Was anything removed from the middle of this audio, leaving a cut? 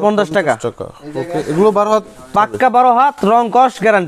no; 0 cuts

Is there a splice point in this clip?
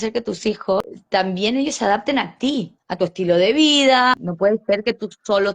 yes; 2 cuts; at 1.0 s, 4.3 s

